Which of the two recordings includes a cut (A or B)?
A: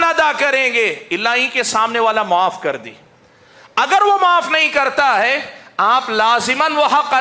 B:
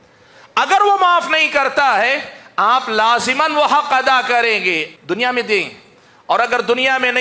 B